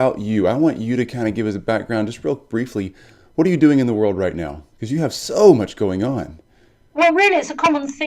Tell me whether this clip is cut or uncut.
cut